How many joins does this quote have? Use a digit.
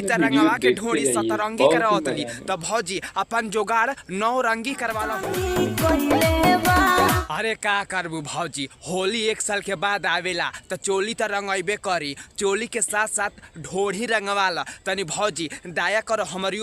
1